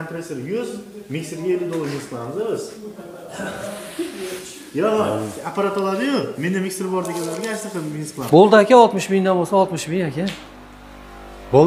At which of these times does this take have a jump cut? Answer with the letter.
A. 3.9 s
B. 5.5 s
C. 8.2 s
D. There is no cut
C